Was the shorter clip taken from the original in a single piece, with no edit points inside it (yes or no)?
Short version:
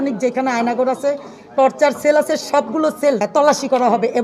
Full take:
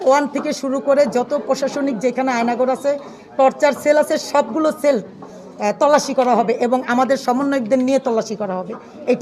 no